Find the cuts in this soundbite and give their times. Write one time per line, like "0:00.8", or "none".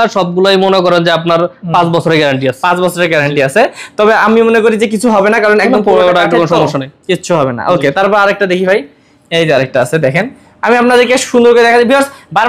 none